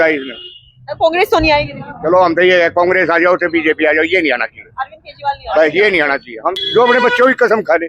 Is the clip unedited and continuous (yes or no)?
no